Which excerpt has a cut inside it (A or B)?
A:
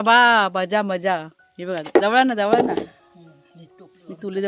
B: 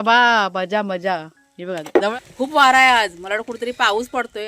B